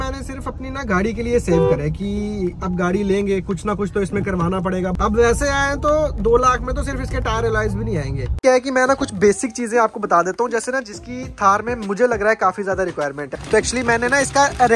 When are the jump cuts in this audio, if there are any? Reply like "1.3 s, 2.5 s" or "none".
4.9 s, 8.3 s, 13.3 s

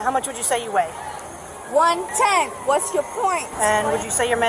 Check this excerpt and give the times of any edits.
2.1 s, 3.5 s

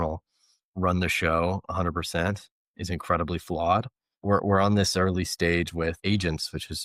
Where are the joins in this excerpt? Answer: 2.7 s, 4.2 s, 6.0 s

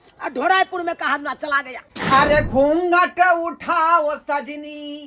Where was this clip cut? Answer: 1.9 s

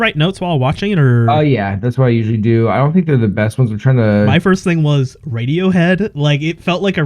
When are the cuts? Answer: 4.3 s

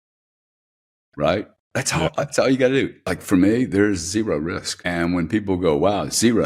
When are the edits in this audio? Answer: 3.0 s

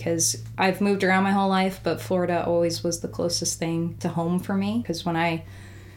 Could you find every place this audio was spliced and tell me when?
4.0 s, 4.8 s

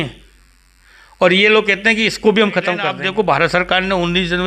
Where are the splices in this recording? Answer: 2.9 s

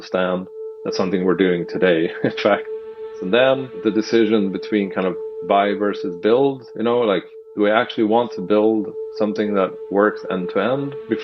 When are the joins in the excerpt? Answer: 2.8 s, 3.8 s

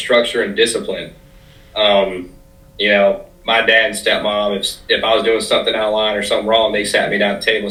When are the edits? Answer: none

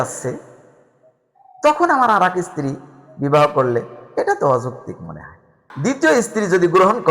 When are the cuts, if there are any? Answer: 5.6 s

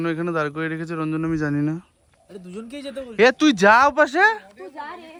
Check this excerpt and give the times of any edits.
none

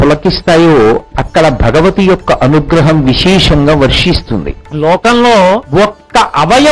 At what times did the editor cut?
4.6 s, 5.7 s

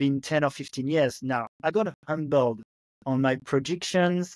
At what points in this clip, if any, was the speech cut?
1.5 s

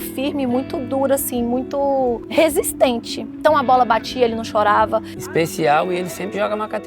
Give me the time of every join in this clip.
2.2 s, 5.1 s

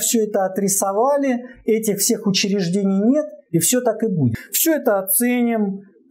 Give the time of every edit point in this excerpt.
4.4 s

